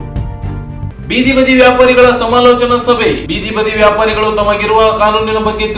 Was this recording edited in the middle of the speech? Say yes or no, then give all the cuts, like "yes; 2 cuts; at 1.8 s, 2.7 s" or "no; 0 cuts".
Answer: no; 0 cuts